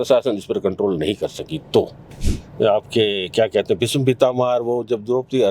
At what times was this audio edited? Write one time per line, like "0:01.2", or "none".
0:02.0